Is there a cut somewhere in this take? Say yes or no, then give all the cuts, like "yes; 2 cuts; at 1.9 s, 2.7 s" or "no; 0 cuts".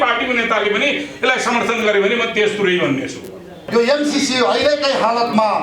yes; 1 cut; at 3.6 s